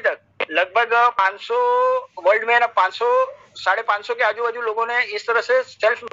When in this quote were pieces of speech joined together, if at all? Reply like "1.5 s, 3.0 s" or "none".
none